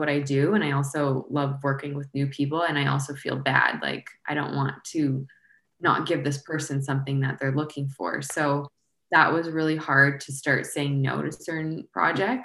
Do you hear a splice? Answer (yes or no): no